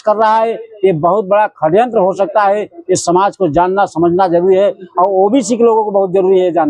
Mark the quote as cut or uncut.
uncut